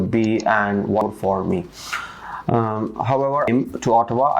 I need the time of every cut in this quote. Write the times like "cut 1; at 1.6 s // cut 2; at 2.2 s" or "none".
cut 1; at 1.0 s // cut 2; at 3.5 s